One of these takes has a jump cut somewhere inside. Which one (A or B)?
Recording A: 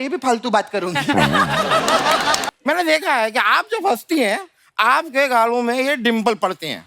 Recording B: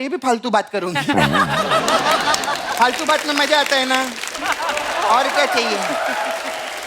A